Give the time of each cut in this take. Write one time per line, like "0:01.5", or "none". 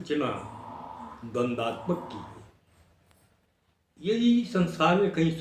0:03.4